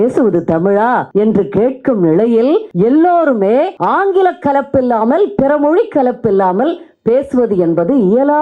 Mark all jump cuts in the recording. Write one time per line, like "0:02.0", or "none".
0:01.1
0:02.7
0:03.8